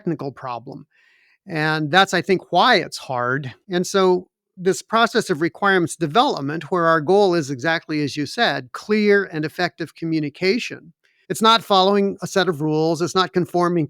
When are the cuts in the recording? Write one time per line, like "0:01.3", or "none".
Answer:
0:03.5